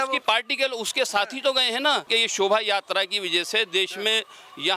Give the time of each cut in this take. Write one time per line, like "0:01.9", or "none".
0:02.0